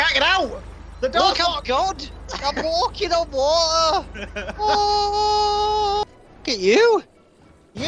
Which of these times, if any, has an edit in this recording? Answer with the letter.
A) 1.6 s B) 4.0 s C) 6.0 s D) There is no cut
C